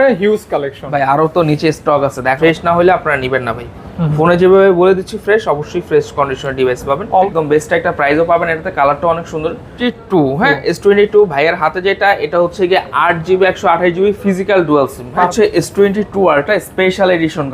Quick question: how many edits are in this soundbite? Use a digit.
4